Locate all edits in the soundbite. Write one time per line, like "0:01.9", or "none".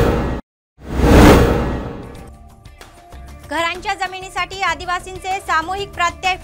none